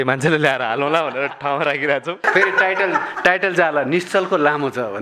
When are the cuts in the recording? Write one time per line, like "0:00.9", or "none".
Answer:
0:02.2

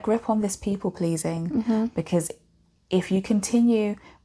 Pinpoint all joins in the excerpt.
none

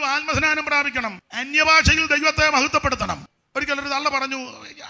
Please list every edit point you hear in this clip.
0:01.3
0:03.3

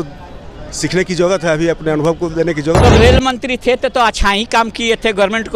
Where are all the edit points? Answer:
0:02.8

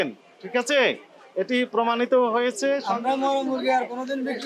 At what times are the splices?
0:02.9

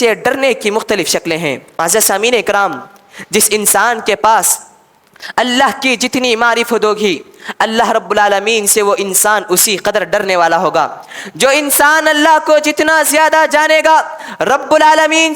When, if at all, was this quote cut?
0:01.7

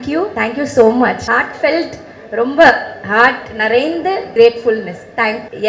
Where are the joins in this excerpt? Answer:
none

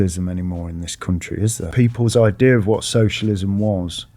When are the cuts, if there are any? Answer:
0:01.7

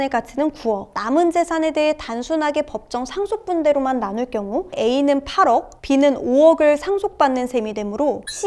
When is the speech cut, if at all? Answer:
0:01.0
0:04.8

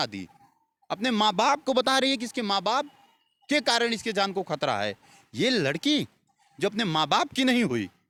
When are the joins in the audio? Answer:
none

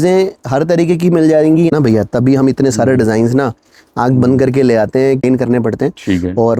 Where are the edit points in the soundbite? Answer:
0:01.7
0:05.2

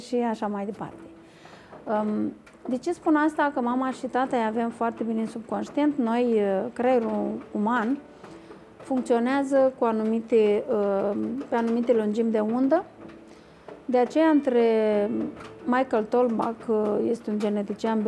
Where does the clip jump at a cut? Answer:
none

